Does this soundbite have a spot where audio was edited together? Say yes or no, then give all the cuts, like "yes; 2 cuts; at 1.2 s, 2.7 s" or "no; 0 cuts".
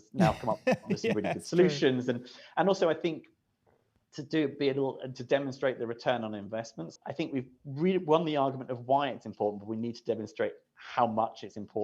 yes; 1 cut; at 6.9 s